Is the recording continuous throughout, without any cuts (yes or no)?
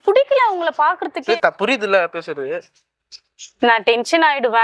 no